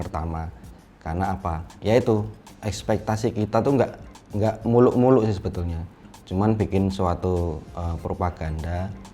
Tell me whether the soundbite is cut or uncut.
cut